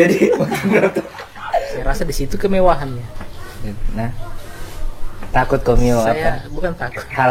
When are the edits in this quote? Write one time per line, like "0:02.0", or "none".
0:01.7